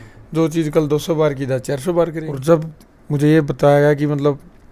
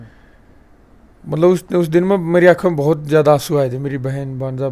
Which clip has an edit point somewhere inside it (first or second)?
first